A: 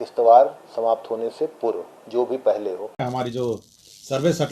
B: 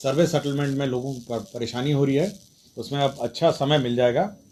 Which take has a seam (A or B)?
A